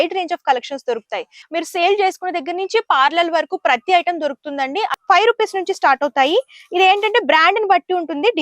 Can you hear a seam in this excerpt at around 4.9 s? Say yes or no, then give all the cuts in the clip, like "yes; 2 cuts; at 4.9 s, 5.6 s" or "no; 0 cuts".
yes; 2 cuts; at 1.4 s, 4.9 s